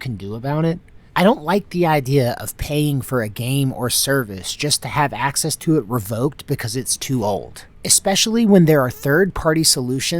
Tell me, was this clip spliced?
yes; 1 cut; at 0.9 s

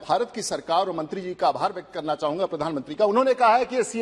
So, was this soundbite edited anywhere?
no; 0 cuts

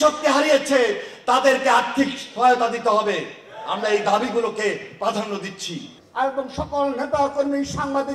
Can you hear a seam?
yes; 1 cut; at 5.6 s

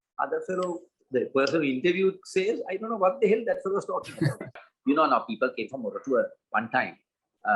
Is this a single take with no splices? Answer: no; 1 cut; at 4.7 s

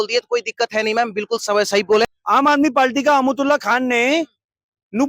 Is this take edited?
yes; 1 cut; at 2.1 s

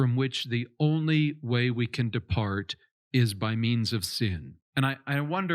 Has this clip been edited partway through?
yes; 1 cut; at 4.5 s

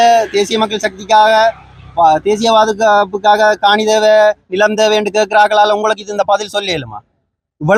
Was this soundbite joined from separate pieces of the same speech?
no; 0 cuts

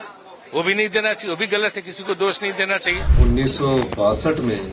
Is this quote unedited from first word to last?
no; 1 cut; at 3.1 s

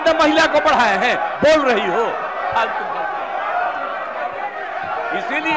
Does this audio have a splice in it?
no; 0 cuts

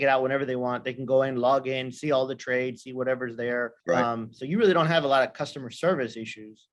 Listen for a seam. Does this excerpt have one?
no; 0 cuts

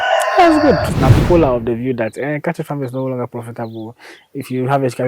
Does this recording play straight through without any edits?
no; 1 cut; at 1.0 s

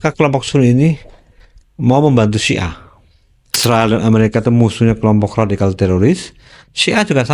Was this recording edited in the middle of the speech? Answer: yes; 1 cut; at 3.6 s

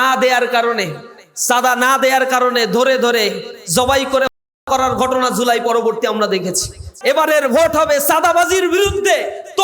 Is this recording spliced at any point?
yes; 1 cut; at 6.9 s

